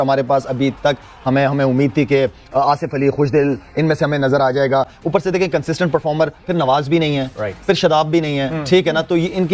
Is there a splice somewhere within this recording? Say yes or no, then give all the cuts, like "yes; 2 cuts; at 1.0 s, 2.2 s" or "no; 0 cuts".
no; 0 cuts